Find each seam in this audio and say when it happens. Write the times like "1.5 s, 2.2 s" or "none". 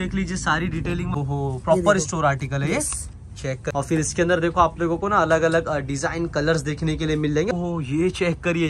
1.2 s, 3.7 s, 7.5 s